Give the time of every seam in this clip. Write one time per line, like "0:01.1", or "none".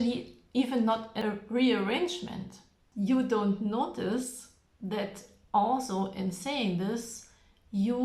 0:01.2
0:02.8